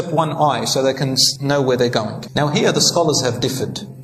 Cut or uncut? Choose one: cut